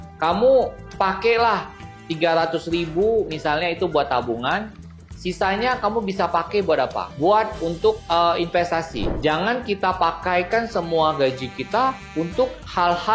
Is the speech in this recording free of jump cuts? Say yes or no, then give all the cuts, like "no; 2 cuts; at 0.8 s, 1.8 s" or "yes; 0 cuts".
no; 1 cut; at 9.1 s